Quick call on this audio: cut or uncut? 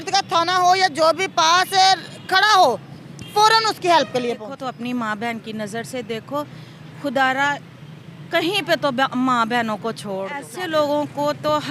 cut